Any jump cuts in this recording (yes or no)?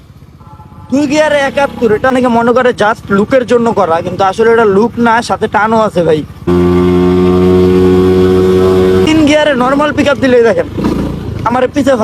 yes